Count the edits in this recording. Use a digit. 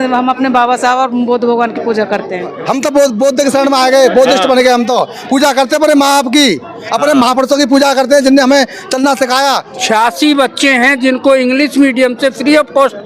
2